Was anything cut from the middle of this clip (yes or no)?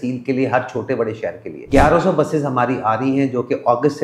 yes